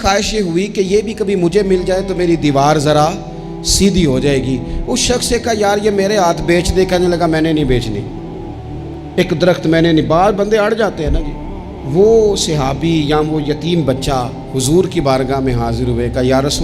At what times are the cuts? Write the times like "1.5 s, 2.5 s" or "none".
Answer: none